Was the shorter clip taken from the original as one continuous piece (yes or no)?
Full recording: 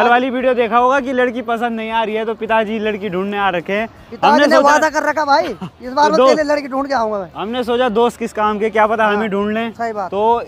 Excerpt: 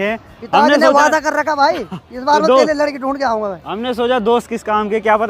yes